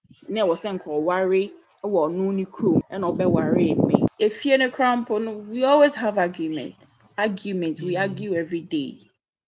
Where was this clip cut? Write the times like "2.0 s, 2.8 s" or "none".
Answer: 2.8 s, 4.1 s